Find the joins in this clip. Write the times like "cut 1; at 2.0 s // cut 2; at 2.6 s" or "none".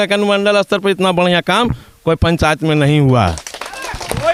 none